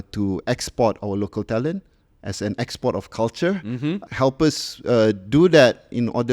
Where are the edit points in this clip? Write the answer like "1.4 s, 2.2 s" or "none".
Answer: 4.0 s

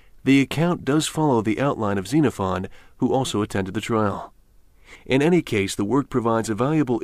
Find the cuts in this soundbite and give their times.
5.6 s

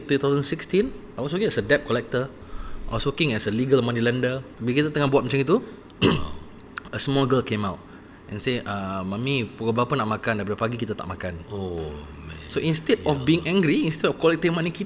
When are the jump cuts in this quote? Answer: 1.1 s, 4.5 s

